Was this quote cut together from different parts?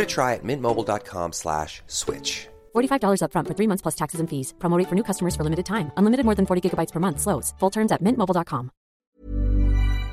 yes; 1 cut; at 9.0 s

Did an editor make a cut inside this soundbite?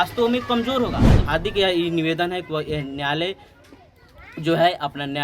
yes; 1 cut; at 1.1 s

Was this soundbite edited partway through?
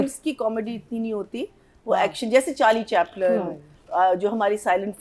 no; 0 cuts

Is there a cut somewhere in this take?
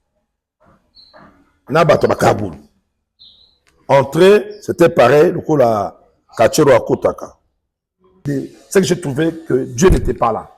yes; 1 cut; at 8.2 s

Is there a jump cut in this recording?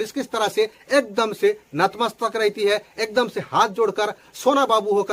no; 0 cuts

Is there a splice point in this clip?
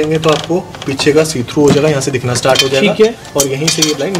no; 0 cuts

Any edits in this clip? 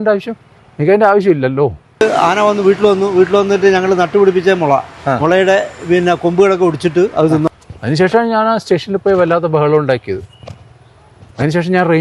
yes; 2 cuts; at 2.0 s, 7.5 s

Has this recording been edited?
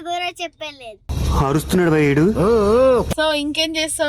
yes; 1 cut; at 3.1 s

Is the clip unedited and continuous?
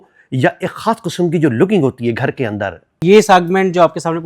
no; 1 cut; at 3.0 s

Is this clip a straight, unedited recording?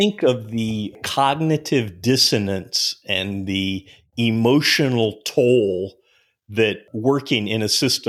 no; 2 cuts; at 1.0 s, 6.9 s

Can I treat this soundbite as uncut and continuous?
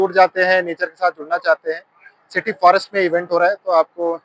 yes; 0 cuts

